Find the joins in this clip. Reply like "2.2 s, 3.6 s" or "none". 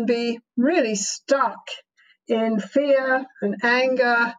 none